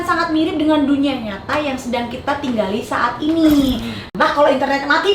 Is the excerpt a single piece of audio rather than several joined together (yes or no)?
no